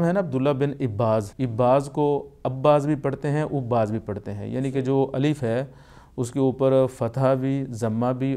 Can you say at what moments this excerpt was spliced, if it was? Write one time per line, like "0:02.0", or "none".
0:01.4